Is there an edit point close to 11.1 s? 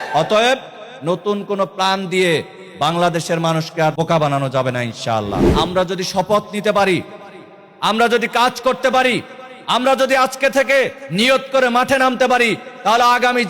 no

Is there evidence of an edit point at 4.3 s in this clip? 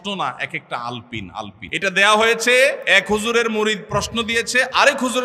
no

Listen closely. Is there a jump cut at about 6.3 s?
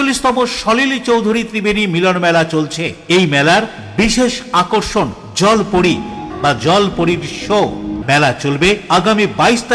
yes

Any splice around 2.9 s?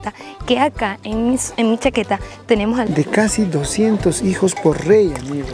yes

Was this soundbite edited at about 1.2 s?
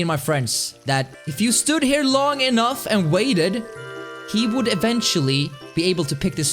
yes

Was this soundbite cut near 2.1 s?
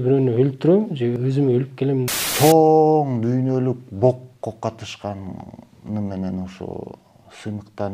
yes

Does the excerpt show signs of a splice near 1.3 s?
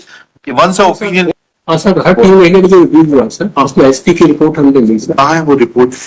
yes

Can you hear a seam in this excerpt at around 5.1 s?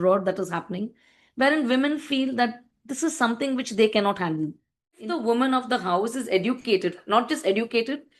yes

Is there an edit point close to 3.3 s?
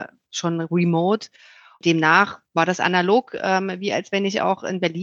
no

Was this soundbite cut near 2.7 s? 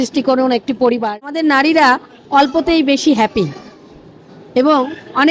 no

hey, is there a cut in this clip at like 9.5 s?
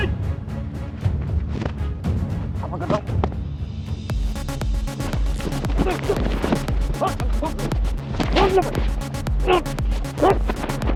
no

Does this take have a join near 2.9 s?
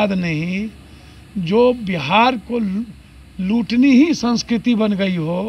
no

